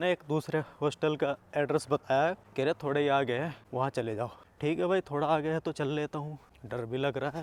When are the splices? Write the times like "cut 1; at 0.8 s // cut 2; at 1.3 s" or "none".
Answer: none